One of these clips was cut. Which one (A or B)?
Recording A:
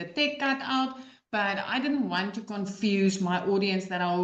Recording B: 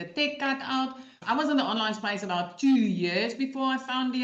B